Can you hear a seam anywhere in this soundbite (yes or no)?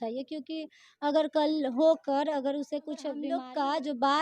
yes